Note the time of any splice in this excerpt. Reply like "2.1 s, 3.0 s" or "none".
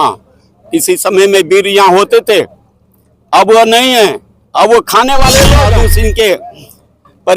5.7 s